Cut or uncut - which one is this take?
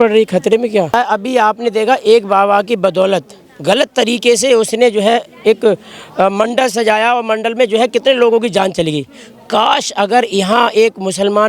cut